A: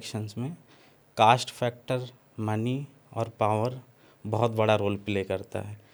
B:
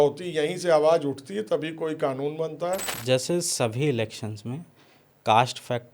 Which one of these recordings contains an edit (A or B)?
B